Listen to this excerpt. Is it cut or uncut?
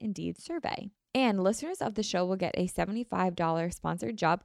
cut